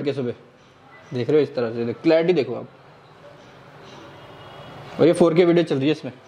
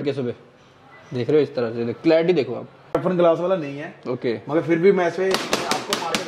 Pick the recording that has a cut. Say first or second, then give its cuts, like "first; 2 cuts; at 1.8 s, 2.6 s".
second; 1 cut; at 2.9 s